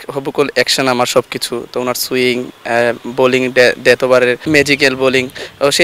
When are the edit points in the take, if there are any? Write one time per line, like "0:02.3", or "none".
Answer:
0:04.4